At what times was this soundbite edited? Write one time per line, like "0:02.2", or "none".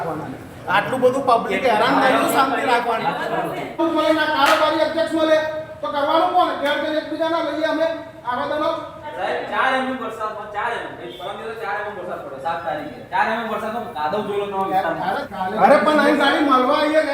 0:03.8
0:09.1
0:15.2